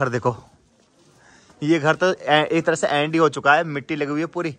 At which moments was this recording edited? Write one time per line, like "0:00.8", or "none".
none